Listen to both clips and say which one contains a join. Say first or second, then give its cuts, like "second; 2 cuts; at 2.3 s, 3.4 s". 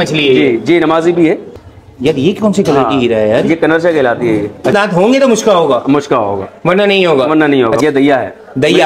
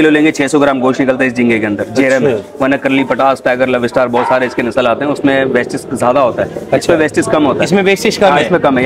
first; 3 cuts; at 1.5 s, 4.7 s, 7.8 s